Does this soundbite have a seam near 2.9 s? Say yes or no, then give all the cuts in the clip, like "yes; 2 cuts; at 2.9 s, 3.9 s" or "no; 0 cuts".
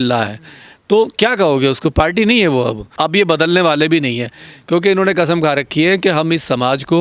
yes; 1 cut; at 2.9 s